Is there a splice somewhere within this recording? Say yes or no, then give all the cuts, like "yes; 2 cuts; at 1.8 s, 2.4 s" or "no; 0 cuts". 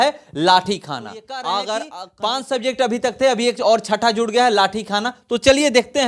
yes; 1 cut; at 2.0 s